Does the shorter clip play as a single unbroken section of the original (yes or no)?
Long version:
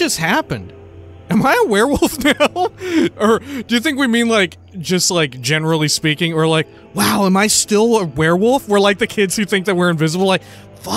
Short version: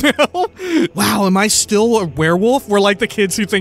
no